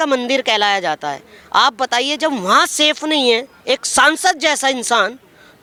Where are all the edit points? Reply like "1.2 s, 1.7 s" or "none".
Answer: none